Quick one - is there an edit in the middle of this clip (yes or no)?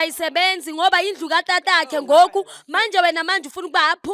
no